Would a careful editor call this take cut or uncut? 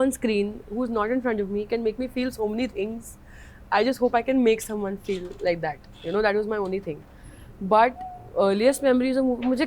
uncut